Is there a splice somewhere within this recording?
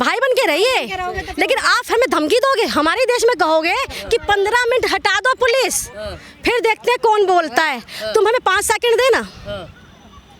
no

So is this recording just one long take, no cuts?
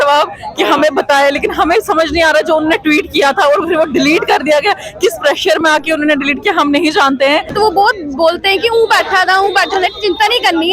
no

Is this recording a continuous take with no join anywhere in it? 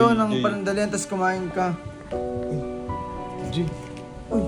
yes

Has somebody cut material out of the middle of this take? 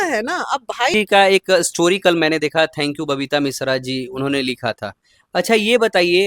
yes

